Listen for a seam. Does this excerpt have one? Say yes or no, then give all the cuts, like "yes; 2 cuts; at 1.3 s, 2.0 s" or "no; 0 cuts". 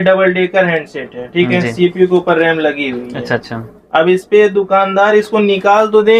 no; 0 cuts